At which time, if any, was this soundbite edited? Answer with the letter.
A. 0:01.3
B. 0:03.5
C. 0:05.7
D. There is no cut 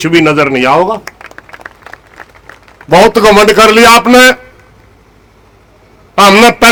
D